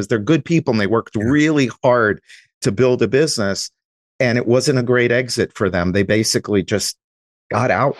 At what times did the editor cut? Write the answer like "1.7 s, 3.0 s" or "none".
none